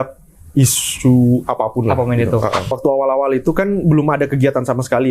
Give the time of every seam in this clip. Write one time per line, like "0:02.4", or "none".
0:02.7